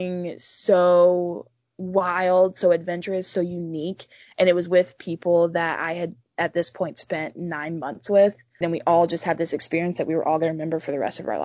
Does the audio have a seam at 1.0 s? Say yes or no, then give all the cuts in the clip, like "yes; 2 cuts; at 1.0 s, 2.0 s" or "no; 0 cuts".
no; 1 cut; at 8.5 s